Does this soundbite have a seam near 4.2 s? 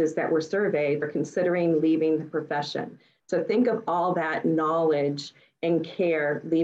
no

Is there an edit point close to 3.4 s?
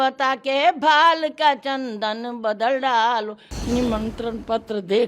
yes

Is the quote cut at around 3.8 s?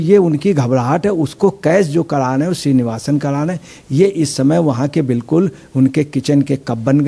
no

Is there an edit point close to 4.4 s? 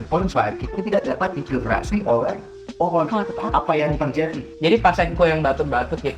yes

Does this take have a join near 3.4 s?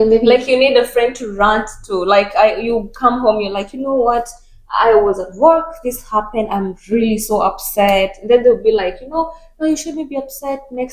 no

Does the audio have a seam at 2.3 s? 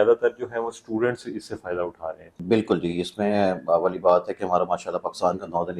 yes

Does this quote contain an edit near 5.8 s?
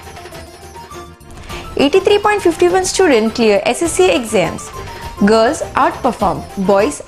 no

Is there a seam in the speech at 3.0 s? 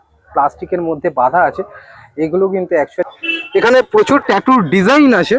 yes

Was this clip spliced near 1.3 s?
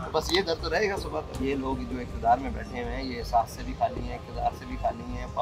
yes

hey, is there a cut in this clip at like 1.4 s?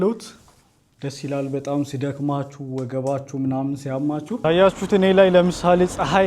no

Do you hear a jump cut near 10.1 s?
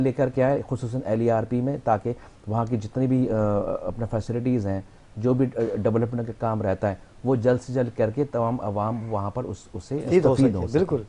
yes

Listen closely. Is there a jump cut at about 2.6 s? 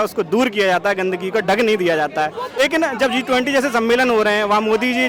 yes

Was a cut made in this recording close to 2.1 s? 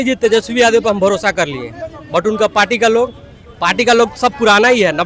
no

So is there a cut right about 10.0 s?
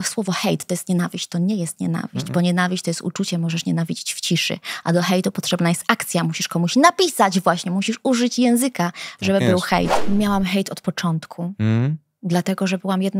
yes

